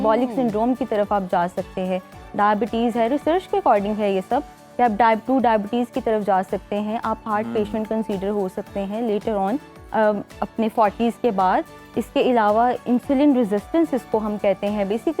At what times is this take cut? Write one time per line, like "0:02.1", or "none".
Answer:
none